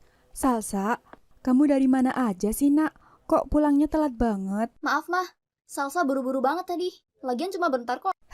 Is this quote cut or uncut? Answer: cut